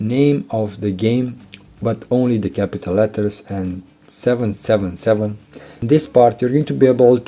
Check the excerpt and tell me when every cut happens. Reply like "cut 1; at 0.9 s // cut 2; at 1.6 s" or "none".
cut 1; at 5.8 s